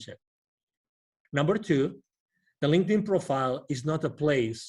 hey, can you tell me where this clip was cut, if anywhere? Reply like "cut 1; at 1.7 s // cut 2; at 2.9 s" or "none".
cut 1; at 1.1 s